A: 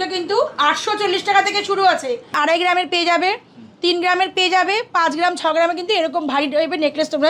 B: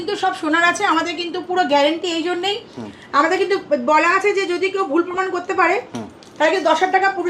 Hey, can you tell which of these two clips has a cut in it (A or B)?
A